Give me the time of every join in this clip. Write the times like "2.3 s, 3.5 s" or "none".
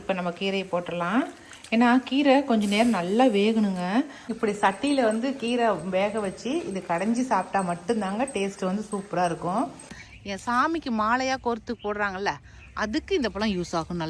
4.2 s, 9.9 s